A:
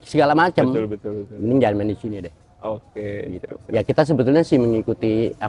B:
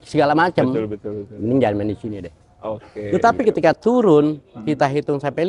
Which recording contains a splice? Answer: B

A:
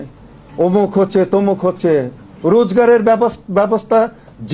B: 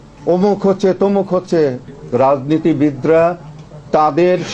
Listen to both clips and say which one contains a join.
B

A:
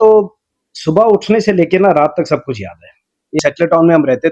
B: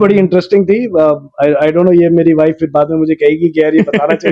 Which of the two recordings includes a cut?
A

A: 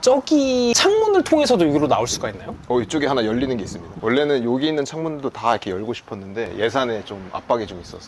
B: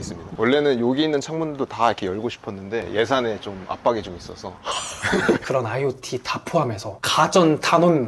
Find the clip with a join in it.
B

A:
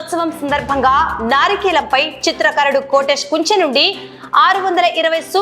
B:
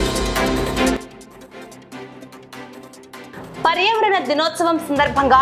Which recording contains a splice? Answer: B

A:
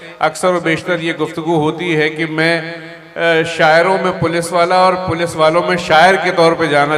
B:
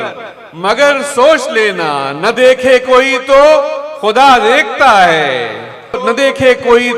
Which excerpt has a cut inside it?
B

